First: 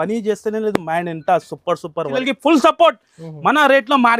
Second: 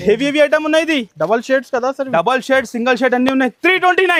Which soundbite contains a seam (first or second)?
first